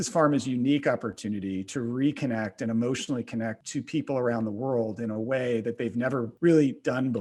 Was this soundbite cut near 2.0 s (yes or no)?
no